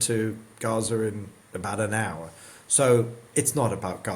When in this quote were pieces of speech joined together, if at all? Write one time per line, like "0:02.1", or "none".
none